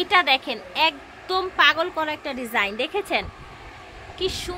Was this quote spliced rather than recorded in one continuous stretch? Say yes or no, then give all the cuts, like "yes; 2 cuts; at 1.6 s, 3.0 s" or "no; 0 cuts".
no; 0 cuts